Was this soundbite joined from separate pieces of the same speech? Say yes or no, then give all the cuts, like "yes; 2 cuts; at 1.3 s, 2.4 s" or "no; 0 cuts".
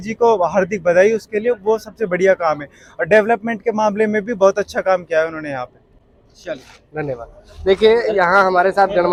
no; 0 cuts